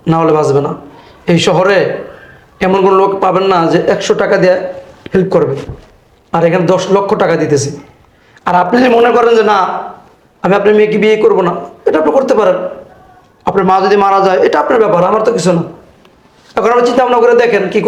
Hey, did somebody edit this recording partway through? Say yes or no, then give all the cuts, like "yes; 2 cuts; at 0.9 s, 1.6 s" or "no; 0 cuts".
no; 0 cuts